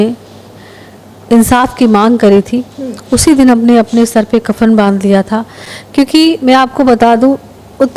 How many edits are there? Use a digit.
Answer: 0